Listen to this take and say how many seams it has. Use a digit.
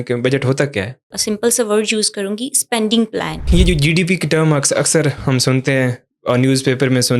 2